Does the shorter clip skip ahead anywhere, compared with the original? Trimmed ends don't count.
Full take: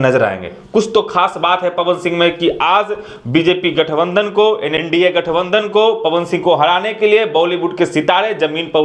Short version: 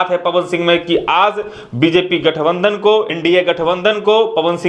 yes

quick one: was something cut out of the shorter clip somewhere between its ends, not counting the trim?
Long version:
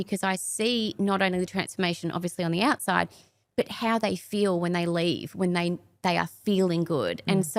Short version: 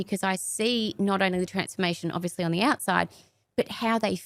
no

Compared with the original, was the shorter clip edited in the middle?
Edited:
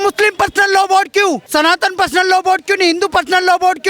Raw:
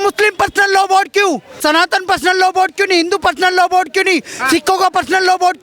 yes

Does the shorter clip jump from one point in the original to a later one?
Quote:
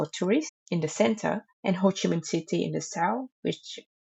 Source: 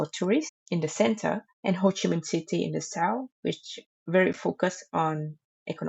no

